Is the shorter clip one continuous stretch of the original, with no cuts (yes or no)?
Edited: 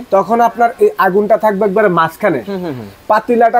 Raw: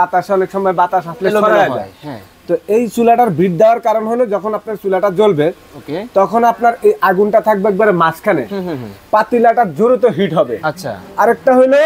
yes